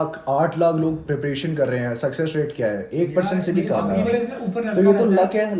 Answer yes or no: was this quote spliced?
no